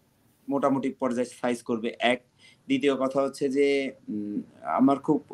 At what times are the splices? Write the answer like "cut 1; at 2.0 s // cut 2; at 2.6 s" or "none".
none